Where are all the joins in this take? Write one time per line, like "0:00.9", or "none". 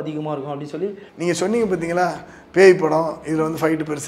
0:01.1